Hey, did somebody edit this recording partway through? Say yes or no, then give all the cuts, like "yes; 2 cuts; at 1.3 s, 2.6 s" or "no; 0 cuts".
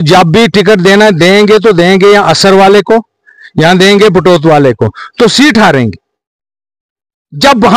no; 0 cuts